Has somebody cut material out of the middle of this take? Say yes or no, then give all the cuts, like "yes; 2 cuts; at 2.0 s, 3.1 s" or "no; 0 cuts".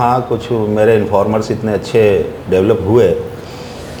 no; 0 cuts